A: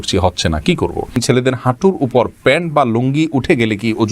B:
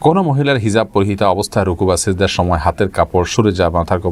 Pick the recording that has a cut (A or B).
A